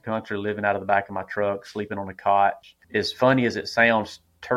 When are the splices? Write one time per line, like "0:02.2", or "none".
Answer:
0:02.7